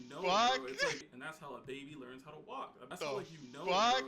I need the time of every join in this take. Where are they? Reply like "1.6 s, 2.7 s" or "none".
1.2 s, 2.9 s

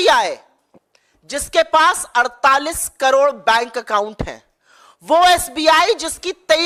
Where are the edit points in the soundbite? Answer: none

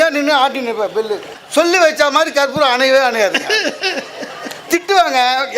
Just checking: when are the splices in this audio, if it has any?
1.3 s

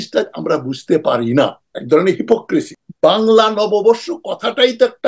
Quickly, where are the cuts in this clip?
2.8 s

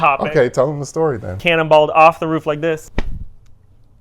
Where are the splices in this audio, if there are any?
1.4 s, 2.9 s

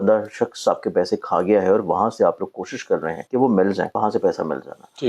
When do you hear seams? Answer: 3.2 s, 3.9 s

